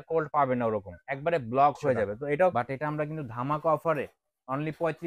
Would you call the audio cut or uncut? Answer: cut